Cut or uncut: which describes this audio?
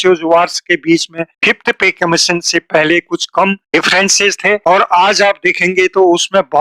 uncut